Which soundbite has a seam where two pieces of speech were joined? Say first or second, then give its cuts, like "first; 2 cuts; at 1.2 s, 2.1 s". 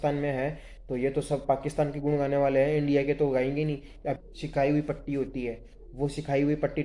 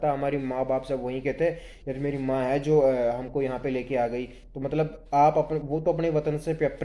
first; 1 cut; at 4.1 s